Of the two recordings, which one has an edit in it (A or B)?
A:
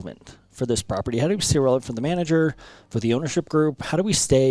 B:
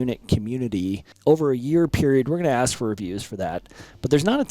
B